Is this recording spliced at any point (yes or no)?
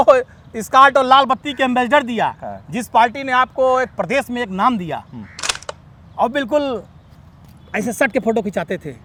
no